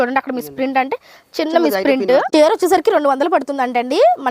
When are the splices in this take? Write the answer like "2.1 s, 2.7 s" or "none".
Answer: 2.3 s